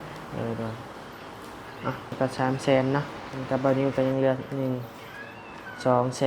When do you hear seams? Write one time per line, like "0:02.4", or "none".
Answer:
0:02.1